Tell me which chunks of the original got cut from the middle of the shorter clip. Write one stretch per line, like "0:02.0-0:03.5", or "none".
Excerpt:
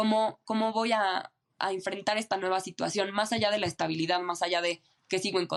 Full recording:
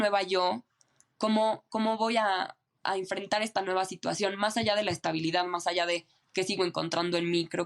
none